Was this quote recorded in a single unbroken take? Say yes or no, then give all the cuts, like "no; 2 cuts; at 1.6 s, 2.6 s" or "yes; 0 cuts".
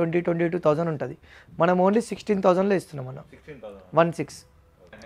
yes; 0 cuts